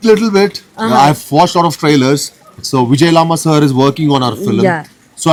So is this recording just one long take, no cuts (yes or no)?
yes